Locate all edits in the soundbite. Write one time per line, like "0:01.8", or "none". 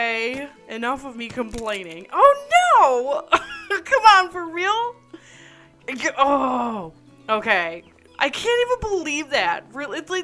none